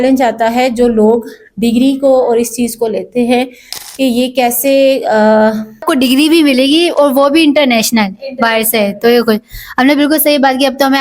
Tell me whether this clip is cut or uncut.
cut